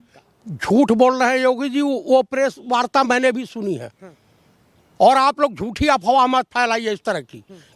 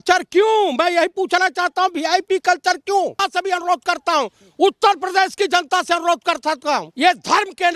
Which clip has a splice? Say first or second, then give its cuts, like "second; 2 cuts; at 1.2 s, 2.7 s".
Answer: second; 2 cuts; at 3.2 s, 6.9 s